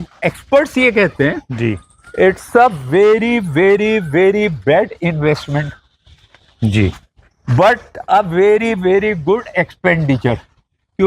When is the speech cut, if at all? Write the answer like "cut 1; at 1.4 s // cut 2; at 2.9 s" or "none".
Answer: none